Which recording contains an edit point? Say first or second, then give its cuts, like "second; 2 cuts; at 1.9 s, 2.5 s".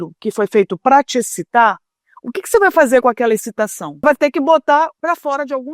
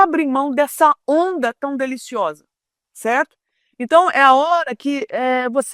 first; 2 cuts; at 4.0 s, 5.0 s